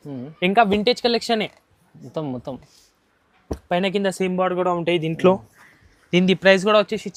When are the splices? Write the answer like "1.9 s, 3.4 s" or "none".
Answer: none